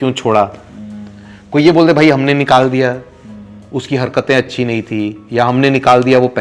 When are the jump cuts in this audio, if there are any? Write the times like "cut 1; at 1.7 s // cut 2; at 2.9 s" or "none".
none

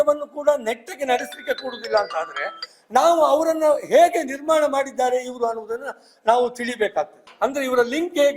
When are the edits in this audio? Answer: cut 1; at 7.2 s

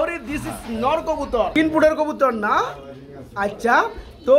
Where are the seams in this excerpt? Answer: cut 1; at 1.5 s

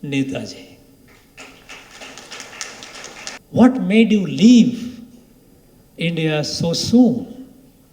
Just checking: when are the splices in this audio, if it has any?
cut 1; at 3.4 s

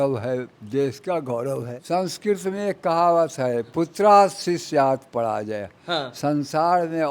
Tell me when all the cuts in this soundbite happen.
cut 1; at 1.7 s

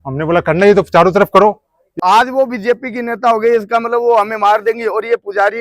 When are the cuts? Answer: cut 1; at 1.9 s

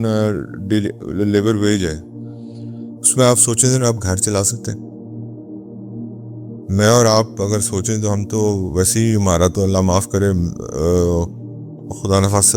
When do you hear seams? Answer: none

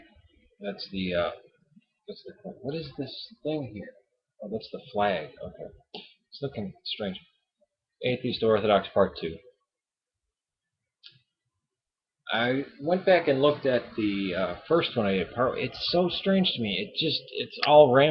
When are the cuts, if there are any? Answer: cut 1; at 3.1 s

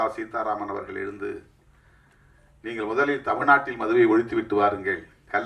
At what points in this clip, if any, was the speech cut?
none

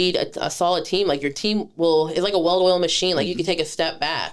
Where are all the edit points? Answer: none

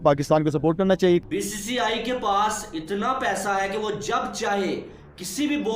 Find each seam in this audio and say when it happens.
cut 1; at 1.2 s

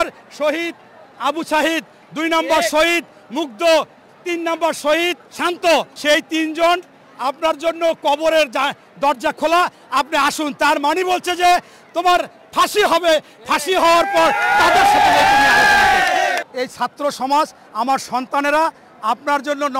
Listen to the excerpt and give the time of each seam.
cut 1; at 5.9 s // cut 2; at 16.4 s

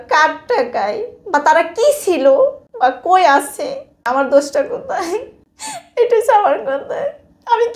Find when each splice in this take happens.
cut 1; at 2.6 s // cut 2; at 4.0 s // cut 3; at 6.0 s

